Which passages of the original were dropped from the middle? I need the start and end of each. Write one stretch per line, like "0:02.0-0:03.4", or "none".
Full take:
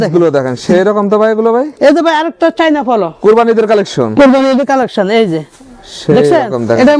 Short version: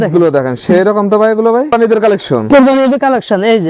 0:01.7-0:03.4